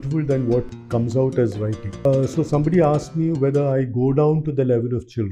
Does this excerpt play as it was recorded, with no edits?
no; 1 cut; at 2.1 s

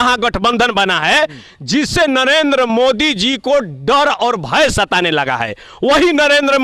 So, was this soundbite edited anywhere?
no; 0 cuts

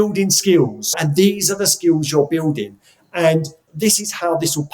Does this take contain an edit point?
yes; 2 cuts; at 0.9 s, 3.6 s

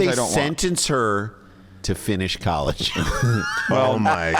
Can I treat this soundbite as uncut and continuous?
yes; 0 cuts

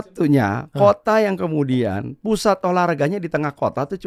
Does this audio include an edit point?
no; 0 cuts

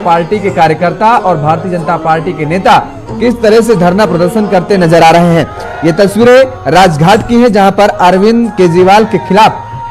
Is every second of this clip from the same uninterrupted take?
yes; 0 cuts

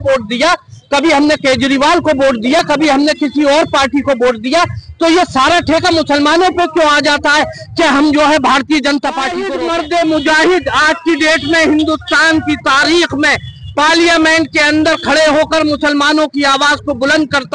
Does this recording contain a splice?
yes; 1 cut; at 9.4 s

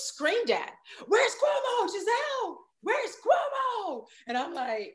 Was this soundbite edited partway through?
no; 0 cuts

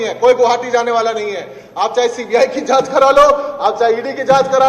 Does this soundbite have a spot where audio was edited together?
no; 0 cuts

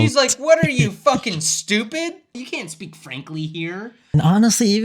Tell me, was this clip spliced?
yes; 2 cuts; at 2.3 s, 4.1 s

